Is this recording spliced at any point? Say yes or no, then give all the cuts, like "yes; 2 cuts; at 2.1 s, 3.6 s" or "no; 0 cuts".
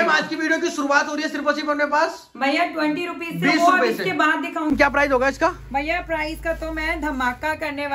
yes; 1 cut; at 4.7 s